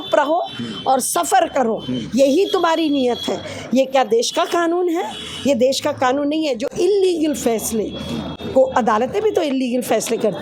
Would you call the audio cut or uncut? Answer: uncut